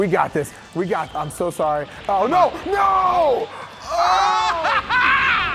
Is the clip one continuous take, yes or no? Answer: yes